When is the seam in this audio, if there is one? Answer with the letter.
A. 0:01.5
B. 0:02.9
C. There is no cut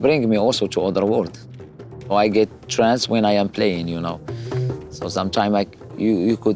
A